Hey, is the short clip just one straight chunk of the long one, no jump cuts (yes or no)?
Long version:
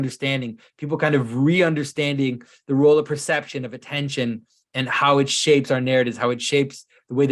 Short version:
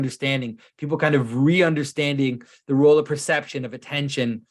yes